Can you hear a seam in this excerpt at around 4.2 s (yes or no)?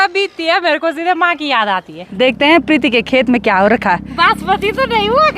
no